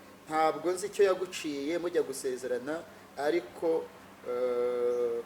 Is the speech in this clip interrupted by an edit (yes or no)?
no